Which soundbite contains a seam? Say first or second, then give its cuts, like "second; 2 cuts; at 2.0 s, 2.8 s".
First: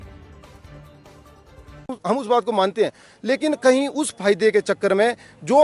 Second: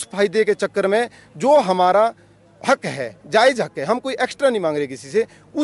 first; 1 cut; at 2.0 s